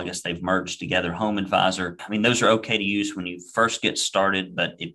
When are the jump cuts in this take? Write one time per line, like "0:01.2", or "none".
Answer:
0:02.0